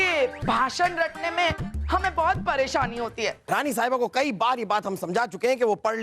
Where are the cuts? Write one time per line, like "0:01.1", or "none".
0:03.4